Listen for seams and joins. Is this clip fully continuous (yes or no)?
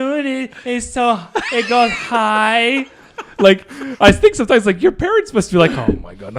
yes